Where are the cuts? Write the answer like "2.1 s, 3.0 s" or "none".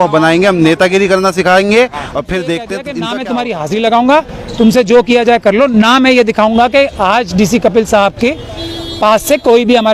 2.9 s